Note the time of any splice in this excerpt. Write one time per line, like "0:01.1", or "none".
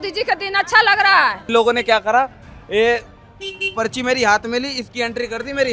0:01.5